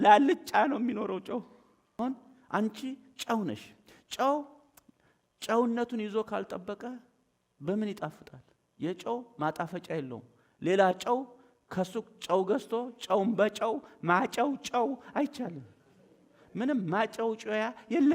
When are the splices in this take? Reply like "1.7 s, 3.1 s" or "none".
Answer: 2.0 s